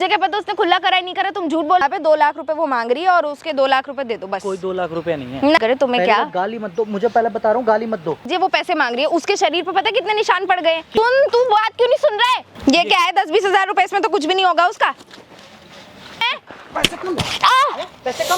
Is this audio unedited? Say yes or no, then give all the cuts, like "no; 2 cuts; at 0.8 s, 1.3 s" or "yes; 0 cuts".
no; 6 cuts; at 1.8 s, 5.6 s, 8.2 s, 10.9 s, 12.5 s, 16.2 s